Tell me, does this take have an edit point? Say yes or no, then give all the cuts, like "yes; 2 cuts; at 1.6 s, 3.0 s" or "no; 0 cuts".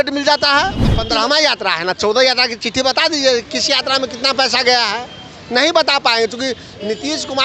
yes; 1 cut; at 1.0 s